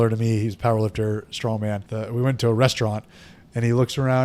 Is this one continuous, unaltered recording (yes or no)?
no